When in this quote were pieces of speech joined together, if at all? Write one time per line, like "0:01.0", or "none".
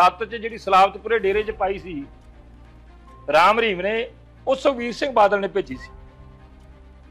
none